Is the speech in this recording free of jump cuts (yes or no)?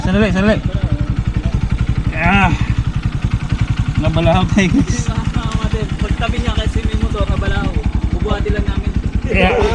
yes